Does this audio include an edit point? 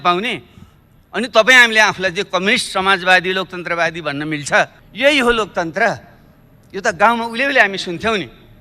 yes; 1 cut; at 4.8 s

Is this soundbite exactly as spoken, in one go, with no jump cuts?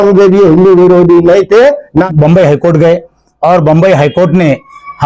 no; 1 cut; at 2.1 s

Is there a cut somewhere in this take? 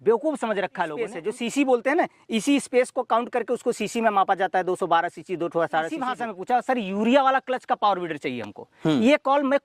yes; 2 cuts; at 1.1 s, 6.1 s

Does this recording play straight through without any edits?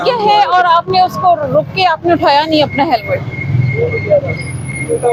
yes; 0 cuts

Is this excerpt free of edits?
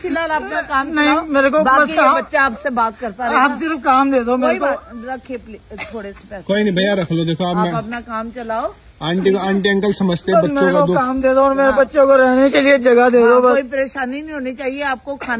yes; 0 cuts

